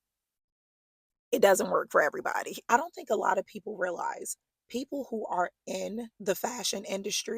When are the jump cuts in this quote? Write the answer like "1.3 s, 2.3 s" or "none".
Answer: 2.5 s, 6.1 s